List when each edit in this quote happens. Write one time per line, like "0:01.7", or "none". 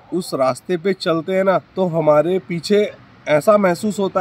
0:01.7

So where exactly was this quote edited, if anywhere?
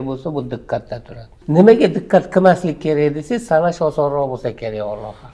0:01.4

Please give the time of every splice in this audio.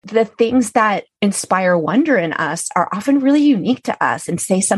0:01.1

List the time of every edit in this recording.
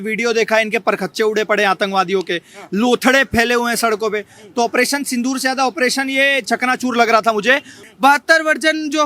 0:07.8

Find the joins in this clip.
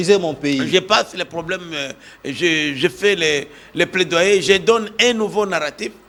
none

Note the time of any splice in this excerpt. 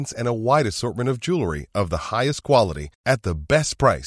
none

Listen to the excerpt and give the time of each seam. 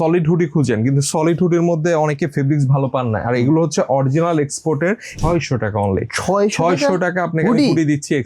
0:05.1

